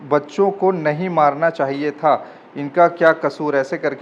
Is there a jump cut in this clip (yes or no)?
no